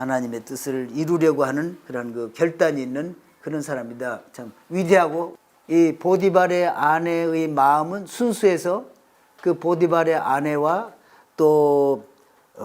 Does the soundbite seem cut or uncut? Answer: cut